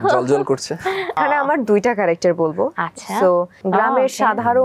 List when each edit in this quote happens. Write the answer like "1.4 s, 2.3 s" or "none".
1.2 s, 3.6 s